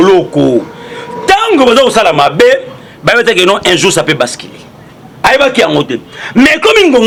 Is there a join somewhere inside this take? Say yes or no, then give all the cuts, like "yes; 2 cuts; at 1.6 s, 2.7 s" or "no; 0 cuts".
no; 0 cuts